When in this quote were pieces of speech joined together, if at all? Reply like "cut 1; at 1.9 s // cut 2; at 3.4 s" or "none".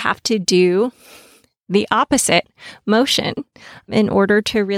none